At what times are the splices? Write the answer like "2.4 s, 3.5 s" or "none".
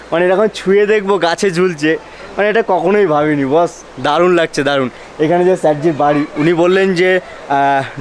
none

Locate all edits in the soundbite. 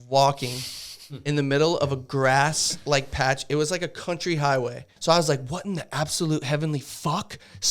4.9 s

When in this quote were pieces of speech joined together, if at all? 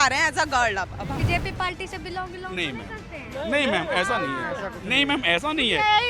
1.2 s

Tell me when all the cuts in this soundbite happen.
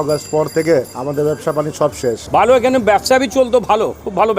2.2 s

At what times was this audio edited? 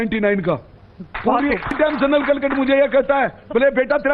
1.7 s

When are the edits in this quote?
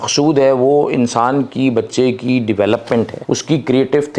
3.2 s

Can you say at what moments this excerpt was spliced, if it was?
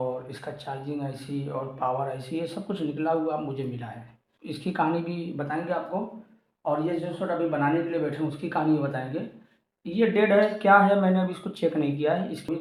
none

